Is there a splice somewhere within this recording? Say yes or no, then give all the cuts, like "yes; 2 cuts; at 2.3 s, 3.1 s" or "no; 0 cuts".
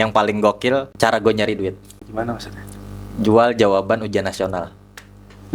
yes; 2 cuts; at 0.9 s, 1.9 s